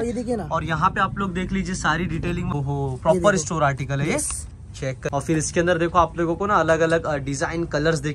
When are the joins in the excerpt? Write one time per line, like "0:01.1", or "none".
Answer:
0:02.6
0:05.1